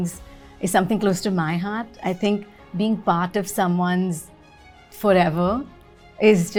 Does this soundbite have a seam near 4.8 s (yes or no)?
no